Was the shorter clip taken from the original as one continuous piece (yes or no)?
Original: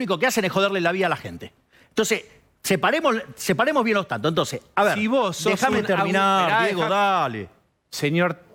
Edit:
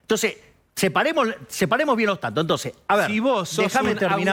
yes